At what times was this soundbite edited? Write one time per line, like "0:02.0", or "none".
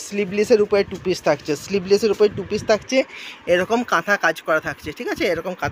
none